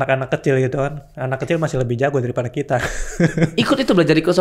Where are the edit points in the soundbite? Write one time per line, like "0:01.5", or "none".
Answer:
none